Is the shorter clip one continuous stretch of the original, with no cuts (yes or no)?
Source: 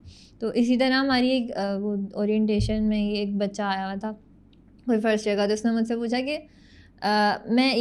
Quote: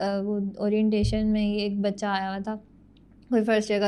yes